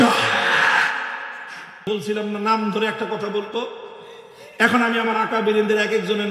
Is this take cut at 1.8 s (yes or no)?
yes